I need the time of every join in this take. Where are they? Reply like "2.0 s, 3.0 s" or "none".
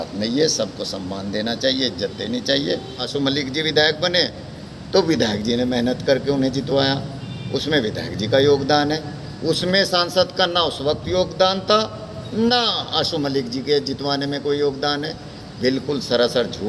3.1 s